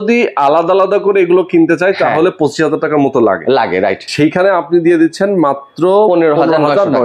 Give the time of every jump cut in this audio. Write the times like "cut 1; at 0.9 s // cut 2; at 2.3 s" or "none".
cut 1; at 4.0 s